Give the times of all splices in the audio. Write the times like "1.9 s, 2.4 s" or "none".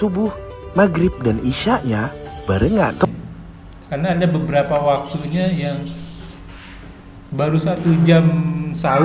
3.1 s